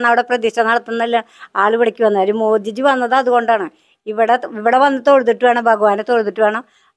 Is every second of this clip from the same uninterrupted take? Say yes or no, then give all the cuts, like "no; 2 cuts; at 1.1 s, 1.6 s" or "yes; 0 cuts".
yes; 0 cuts